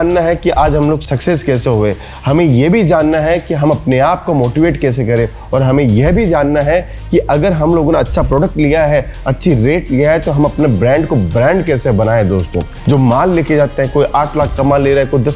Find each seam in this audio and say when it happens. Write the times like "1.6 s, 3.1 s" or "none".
12.7 s